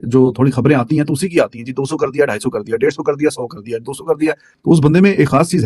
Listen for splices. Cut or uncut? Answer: uncut